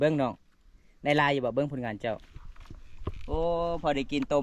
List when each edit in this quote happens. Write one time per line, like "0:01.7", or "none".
none